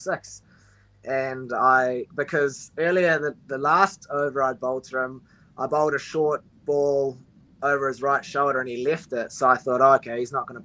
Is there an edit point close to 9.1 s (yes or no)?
no